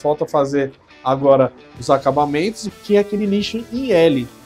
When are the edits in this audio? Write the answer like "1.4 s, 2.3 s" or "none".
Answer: 2.6 s